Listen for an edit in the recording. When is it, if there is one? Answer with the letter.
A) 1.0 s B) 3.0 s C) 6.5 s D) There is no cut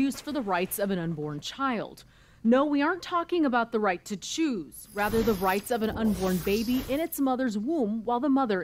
D